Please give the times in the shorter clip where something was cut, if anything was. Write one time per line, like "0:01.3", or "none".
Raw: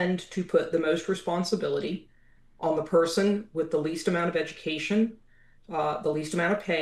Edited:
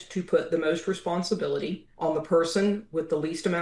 0:01.8